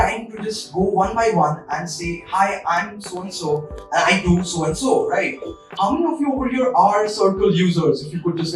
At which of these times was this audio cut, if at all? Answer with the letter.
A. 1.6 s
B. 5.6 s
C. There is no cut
B